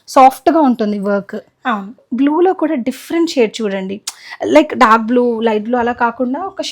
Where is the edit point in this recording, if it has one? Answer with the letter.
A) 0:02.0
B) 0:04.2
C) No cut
A